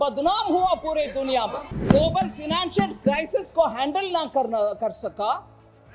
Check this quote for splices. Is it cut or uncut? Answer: cut